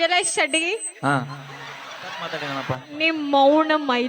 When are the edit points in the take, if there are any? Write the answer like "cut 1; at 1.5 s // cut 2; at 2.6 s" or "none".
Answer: cut 1; at 2.3 s